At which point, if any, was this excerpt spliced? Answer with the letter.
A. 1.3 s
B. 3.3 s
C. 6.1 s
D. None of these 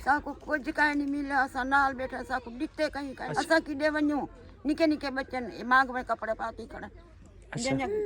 B